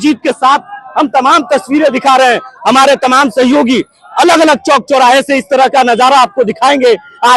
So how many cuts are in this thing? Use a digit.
0